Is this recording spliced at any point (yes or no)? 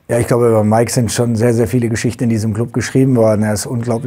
no